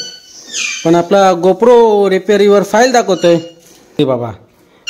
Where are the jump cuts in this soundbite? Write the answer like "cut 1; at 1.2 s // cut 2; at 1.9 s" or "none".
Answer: cut 1; at 4.0 s